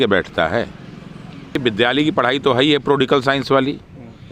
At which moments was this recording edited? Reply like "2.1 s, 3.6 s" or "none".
1.6 s